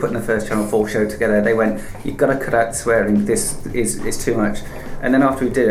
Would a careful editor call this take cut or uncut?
uncut